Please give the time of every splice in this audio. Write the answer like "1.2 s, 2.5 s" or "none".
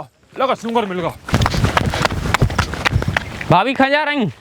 1.2 s, 3.3 s